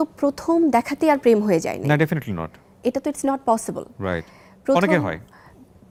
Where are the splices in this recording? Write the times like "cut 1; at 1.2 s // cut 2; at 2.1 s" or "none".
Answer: none